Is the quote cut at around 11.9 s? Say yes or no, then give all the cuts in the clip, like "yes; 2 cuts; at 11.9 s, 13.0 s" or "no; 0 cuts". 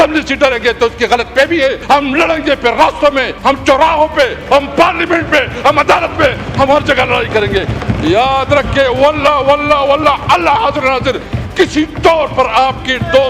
no; 2 cuts; at 1.8 s, 3.3 s